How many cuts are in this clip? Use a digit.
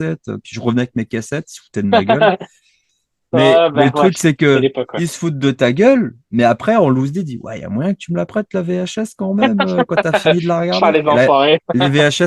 0